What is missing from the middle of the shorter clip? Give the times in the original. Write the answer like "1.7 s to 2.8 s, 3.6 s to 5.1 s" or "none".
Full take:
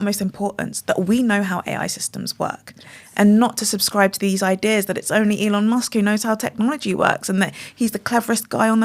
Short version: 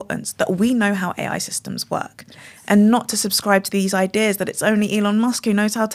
none